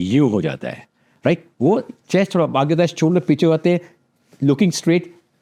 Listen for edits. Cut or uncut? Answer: uncut